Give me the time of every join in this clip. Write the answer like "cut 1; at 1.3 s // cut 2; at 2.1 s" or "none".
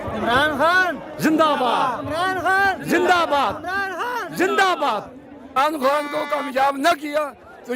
cut 1; at 5.6 s